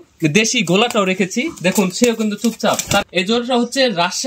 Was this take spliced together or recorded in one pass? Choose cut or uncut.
cut